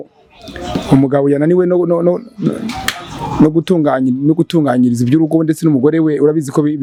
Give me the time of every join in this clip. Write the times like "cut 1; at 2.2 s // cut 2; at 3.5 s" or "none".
none